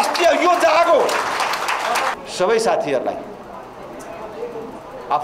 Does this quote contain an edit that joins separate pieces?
yes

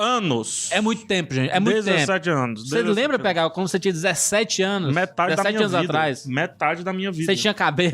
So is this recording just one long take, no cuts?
no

